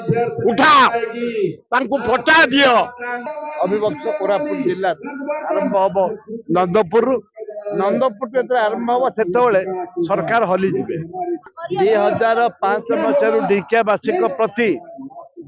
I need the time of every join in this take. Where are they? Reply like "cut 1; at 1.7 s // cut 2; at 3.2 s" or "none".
cut 1; at 3.2 s // cut 2; at 11.5 s

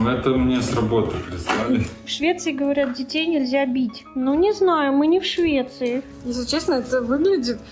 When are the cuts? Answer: cut 1; at 2.0 s // cut 2; at 4.0 s // cut 3; at 6.1 s

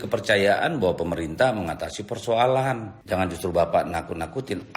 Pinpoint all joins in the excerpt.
cut 1; at 2.9 s

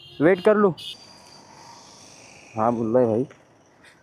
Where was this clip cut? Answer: cut 1; at 0.9 s

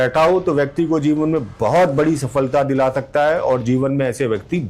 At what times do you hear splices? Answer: none

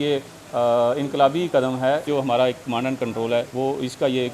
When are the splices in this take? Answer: cut 1; at 2.1 s // cut 2; at 3.5 s

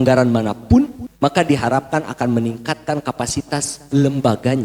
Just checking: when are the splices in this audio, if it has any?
cut 1; at 1.0 s

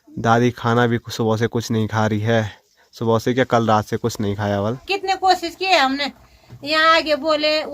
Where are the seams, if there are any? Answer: cut 1; at 4.8 s

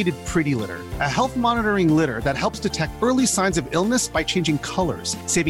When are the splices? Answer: none

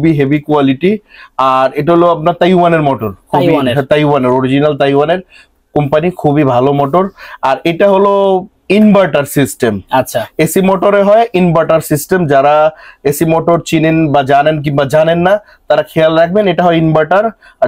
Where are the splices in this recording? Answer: none

